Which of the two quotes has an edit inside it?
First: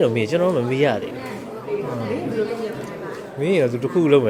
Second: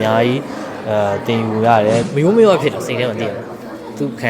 second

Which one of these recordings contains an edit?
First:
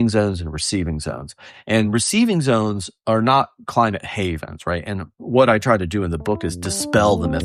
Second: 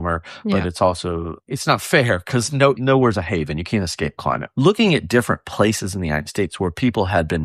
second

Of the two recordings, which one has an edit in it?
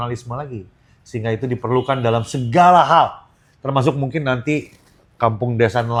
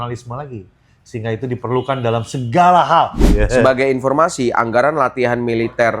second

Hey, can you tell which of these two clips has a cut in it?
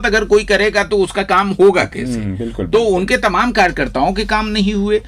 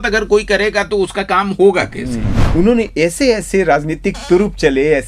second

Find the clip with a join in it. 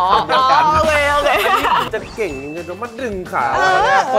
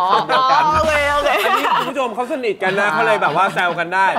first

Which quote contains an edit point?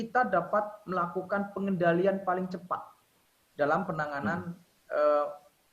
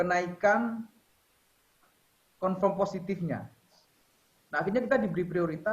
second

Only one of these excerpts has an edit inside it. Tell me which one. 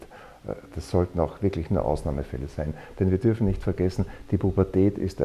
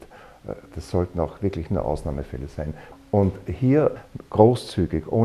second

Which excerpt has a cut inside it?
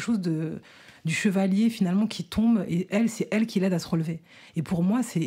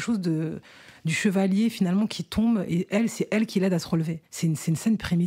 second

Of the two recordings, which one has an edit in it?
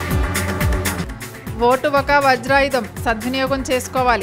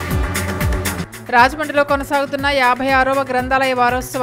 second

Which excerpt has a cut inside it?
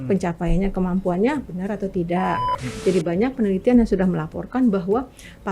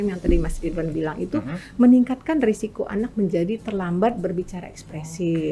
first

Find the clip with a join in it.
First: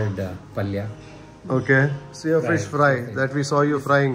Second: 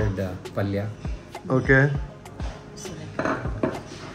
first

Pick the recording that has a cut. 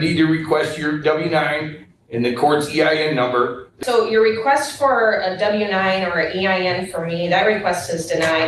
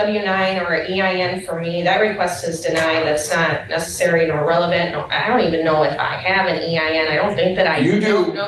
first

